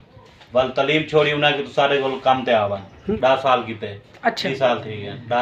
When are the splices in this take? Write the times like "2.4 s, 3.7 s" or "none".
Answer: 3.2 s, 4.5 s